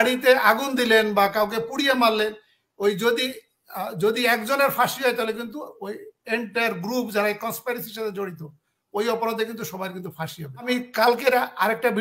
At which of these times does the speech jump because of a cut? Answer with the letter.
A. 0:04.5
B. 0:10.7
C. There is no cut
B